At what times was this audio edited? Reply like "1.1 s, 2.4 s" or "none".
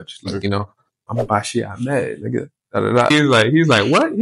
1.1 s, 3.1 s

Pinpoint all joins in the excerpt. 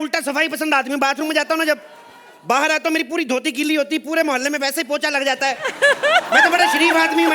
none

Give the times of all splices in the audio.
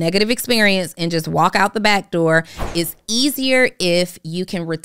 2.6 s

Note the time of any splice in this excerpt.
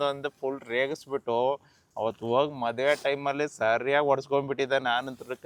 none

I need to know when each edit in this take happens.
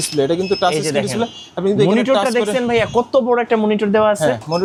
none

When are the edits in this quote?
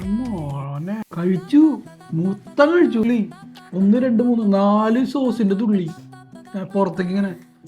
1.0 s, 3.0 s

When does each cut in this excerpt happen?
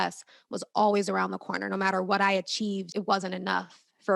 2.9 s

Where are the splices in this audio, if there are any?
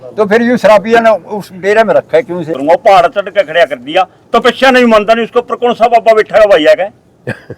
2.5 s

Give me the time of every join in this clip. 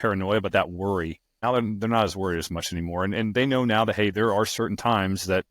1.3 s

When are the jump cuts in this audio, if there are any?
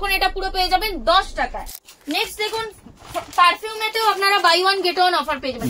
1.8 s

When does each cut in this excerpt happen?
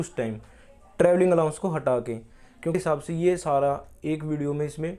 2.8 s

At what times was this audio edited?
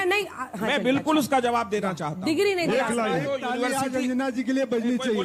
none

